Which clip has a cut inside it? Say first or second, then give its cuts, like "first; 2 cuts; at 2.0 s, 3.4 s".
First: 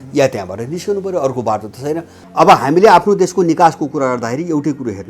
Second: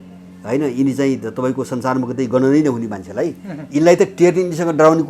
first; 1 cut; at 2.2 s